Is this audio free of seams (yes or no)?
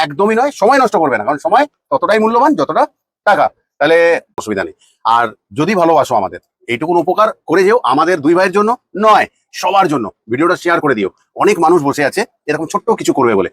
no